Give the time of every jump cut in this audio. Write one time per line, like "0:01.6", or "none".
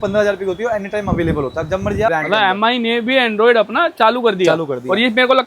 0:02.1

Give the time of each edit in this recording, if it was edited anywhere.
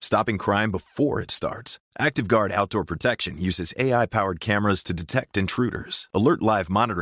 none

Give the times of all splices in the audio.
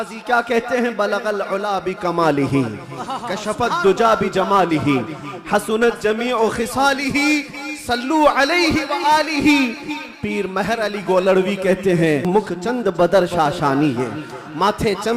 0:12.2

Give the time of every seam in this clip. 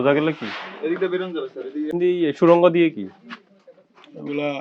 0:01.9

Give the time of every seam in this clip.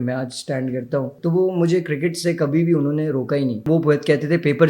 0:01.1
0:03.7

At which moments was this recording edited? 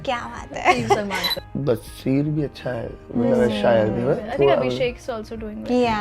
0:01.3

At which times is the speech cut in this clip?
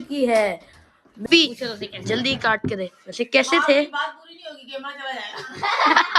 0:01.2

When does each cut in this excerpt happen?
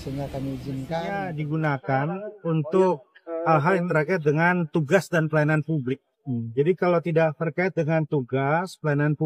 0:01.2

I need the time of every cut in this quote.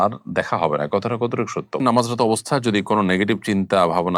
0:01.8

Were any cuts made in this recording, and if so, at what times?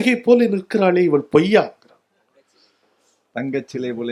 none

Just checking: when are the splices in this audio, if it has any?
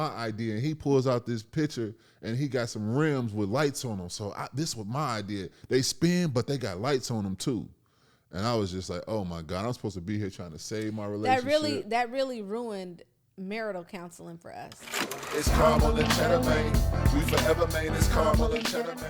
0:14.8

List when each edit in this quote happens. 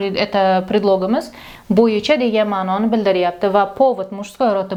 none

